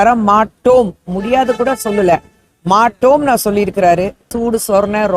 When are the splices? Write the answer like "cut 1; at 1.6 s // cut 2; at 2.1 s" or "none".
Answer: cut 1; at 4.3 s